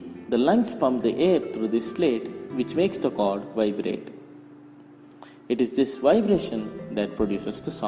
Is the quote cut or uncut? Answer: cut